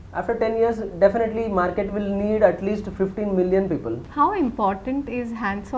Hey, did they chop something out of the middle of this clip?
yes; 1 cut; at 4.0 s

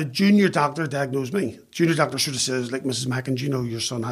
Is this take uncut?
yes; 0 cuts

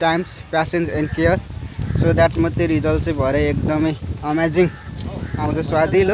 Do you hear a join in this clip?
no; 0 cuts

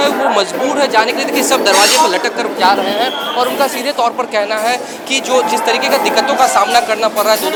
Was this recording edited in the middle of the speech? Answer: no; 0 cuts

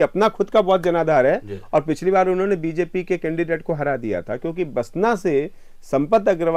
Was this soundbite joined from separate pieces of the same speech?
no; 0 cuts

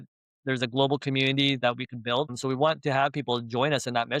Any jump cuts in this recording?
yes; 1 cut; at 2.4 s

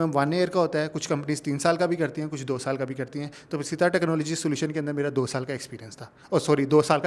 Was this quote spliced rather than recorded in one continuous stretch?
no; 0 cuts

